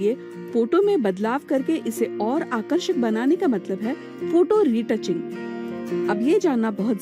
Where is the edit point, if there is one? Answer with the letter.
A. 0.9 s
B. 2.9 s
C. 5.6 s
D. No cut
C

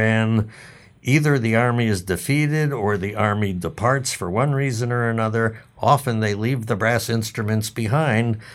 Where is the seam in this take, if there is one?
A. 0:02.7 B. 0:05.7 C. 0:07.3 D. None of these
D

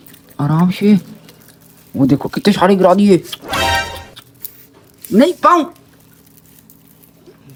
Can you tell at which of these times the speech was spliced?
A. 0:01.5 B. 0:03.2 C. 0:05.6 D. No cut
D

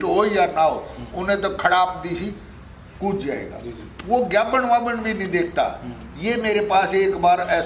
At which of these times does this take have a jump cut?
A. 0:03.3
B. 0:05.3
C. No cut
C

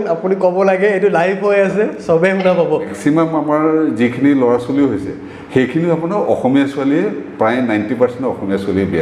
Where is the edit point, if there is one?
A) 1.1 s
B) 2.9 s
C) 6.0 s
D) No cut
B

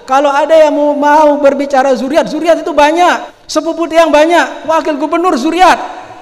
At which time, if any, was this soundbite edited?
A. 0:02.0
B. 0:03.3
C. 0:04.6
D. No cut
B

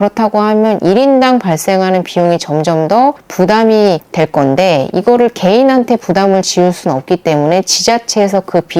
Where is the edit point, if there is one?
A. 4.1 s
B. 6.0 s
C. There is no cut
C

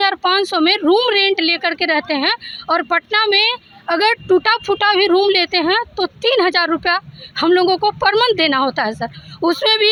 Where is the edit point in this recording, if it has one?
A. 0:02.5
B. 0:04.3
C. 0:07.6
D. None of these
D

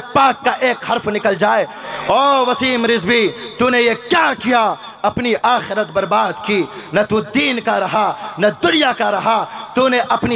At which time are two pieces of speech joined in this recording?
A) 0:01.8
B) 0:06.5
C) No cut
A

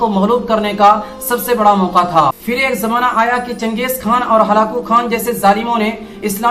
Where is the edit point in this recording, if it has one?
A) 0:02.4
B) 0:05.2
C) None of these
A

